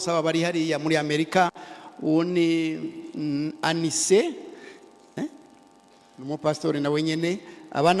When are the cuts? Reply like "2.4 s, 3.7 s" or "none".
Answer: none